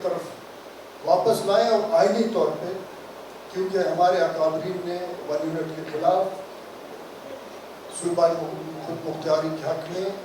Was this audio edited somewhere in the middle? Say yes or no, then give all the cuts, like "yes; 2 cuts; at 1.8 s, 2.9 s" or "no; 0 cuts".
no; 0 cuts